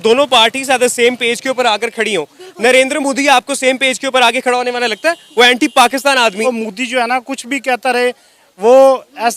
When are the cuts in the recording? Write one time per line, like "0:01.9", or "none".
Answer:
0:06.5